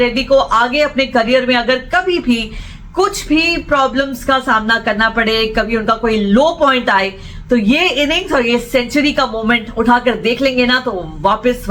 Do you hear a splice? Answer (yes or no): no